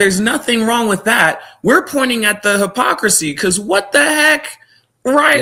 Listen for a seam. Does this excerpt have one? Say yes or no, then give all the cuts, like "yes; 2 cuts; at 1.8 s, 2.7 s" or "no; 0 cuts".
no; 0 cuts